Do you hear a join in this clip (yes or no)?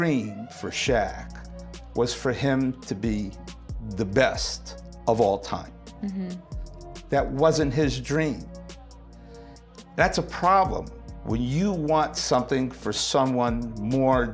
no